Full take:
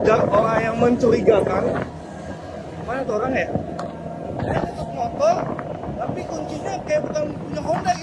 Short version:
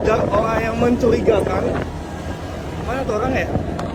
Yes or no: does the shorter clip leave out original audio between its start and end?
no